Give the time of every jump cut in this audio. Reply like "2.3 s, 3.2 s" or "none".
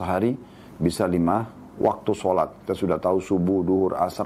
none